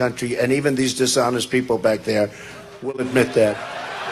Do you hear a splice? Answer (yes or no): yes